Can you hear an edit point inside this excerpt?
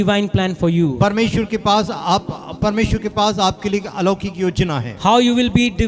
no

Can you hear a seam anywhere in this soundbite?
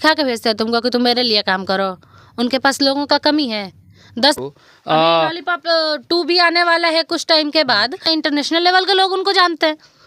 yes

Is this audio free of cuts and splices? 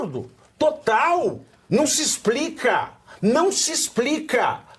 no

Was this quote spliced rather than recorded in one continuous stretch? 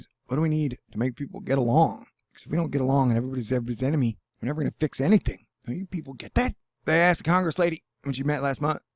yes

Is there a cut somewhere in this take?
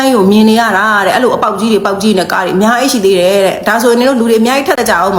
no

